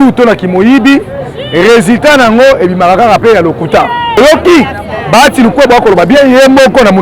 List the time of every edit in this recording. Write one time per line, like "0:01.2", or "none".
0:04.2